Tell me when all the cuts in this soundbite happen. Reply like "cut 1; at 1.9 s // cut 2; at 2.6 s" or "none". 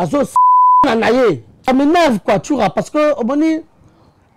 cut 1; at 1.6 s